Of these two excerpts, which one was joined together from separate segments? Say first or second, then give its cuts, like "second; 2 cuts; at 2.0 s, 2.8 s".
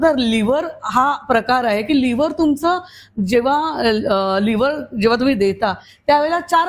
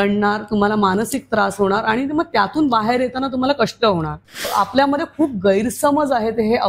second; 1 cut; at 4.5 s